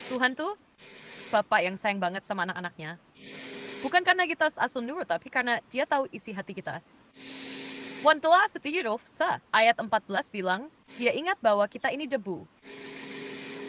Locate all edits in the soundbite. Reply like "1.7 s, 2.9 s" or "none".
7.5 s